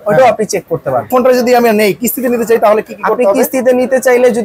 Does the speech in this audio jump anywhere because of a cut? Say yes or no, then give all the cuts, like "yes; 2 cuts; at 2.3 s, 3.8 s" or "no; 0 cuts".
yes; 1 cut; at 1.1 s